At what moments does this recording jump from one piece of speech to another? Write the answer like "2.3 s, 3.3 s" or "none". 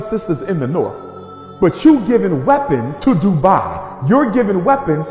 2.9 s